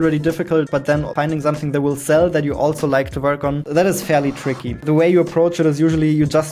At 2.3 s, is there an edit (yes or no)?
no